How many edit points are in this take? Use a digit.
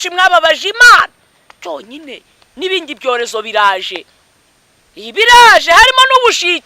1